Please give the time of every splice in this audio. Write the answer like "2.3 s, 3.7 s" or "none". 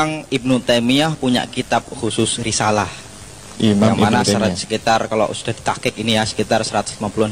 none